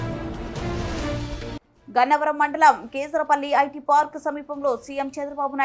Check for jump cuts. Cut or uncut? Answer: uncut